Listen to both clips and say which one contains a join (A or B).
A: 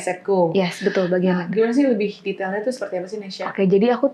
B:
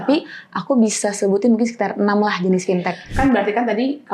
B